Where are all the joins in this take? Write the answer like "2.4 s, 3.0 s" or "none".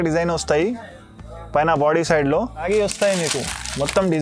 2.7 s